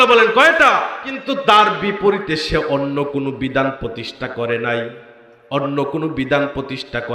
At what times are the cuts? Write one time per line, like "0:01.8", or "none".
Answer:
0:01.1